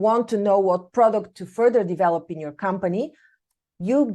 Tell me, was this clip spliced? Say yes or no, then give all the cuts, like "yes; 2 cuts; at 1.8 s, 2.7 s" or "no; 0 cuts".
no; 0 cuts